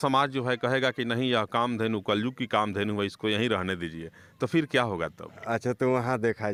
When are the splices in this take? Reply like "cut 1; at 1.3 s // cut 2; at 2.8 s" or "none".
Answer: none

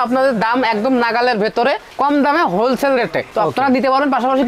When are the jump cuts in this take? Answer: none

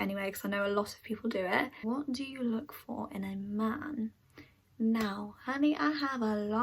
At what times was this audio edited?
cut 1; at 1.8 s

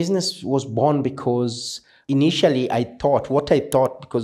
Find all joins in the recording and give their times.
cut 1; at 2.0 s

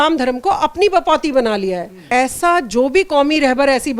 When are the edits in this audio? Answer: cut 1; at 2.0 s

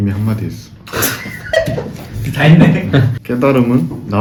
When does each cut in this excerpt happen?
none

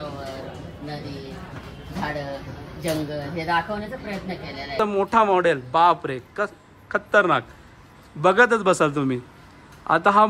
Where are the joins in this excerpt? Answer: cut 1; at 4.8 s

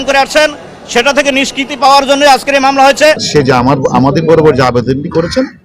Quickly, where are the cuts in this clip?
cut 1; at 3.2 s

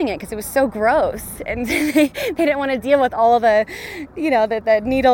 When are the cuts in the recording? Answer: none

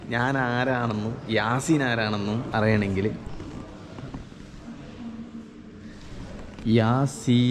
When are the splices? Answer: none

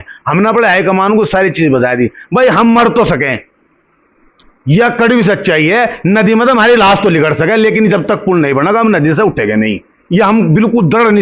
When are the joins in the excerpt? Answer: none

